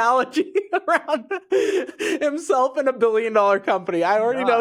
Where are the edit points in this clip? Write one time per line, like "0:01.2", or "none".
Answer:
none